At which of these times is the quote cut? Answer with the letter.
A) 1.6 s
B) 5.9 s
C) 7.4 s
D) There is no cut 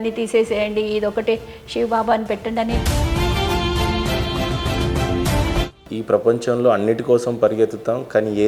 B